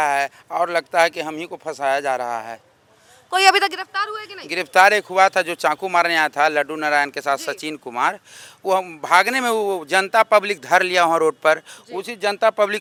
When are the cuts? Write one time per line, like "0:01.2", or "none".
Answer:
none